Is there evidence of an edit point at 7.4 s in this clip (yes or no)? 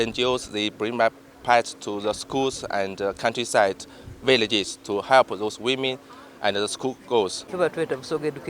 yes